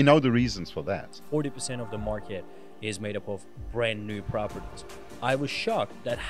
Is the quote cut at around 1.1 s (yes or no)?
yes